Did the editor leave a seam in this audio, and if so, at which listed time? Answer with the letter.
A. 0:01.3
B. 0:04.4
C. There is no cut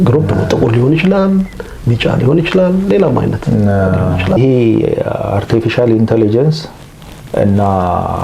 B